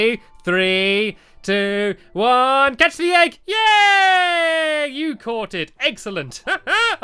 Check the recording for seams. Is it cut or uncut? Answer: cut